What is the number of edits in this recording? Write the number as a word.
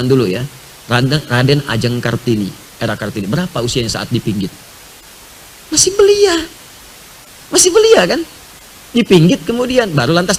zero